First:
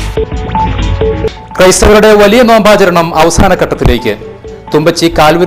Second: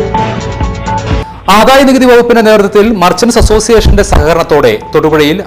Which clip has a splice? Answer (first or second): first